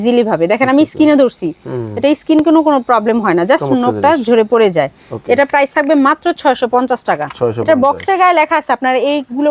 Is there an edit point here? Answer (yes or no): no